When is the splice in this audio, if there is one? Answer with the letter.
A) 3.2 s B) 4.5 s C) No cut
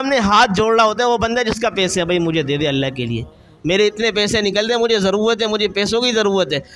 C